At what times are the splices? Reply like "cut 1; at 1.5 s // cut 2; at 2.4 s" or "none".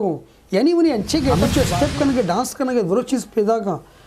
cut 1; at 1.4 s